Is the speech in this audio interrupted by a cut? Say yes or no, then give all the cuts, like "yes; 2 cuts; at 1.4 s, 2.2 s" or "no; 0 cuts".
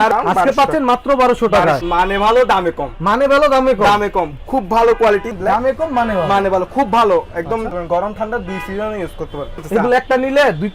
yes; 3 cuts; at 1.8 s, 5.3 s, 9.6 s